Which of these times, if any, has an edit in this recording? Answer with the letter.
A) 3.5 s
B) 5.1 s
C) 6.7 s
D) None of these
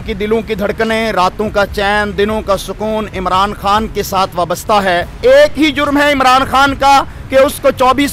B